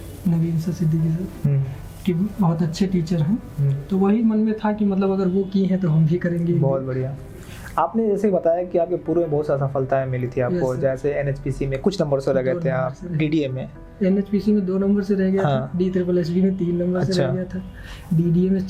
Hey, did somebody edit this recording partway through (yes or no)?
no